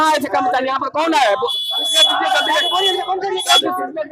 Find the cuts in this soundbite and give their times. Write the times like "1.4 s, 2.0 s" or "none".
none